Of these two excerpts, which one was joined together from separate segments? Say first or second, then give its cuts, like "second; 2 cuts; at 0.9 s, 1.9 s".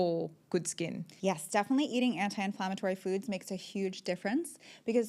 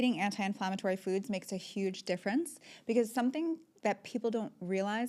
first; 1 cut; at 1.0 s